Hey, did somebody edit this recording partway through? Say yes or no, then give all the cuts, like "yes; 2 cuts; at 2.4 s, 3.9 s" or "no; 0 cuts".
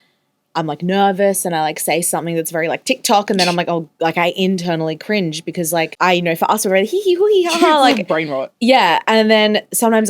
yes; 1 cut; at 5.9 s